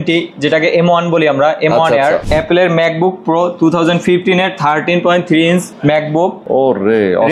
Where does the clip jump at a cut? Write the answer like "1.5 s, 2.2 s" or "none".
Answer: 2.2 s, 6.2 s